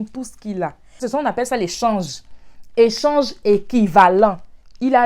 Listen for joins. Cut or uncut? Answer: cut